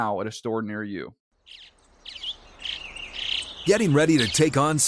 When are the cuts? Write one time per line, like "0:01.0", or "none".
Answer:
0:01.2